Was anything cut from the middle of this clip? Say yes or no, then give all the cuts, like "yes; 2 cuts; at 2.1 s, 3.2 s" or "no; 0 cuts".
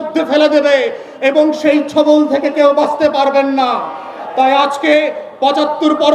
no; 0 cuts